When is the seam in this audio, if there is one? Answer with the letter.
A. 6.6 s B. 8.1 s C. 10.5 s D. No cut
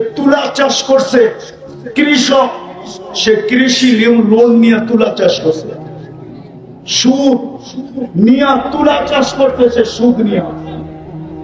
C